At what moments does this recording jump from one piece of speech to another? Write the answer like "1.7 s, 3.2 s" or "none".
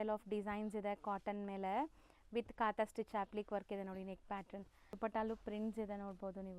4.9 s

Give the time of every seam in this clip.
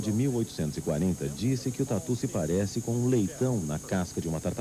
none

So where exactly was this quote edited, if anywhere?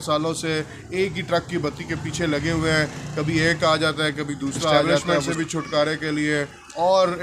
5.2 s

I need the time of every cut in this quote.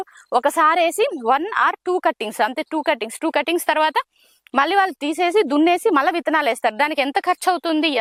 none

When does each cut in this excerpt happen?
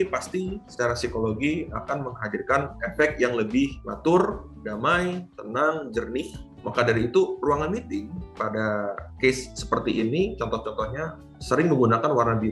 3.8 s, 6.4 s

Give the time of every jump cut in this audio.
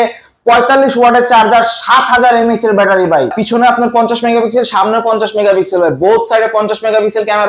3.4 s

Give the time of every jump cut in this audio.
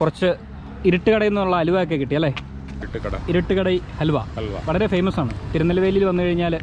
2.8 s

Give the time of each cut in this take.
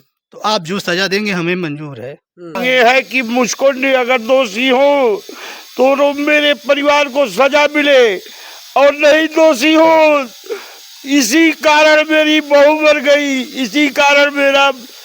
2.6 s

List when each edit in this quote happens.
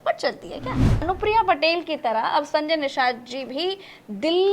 1.0 s

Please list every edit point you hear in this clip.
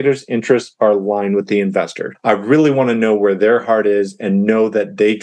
2.0 s

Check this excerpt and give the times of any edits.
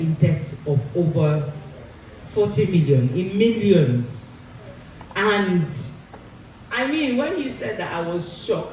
none

